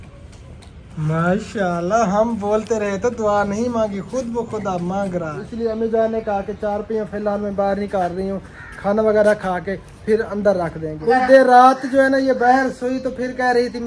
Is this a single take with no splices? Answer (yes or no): no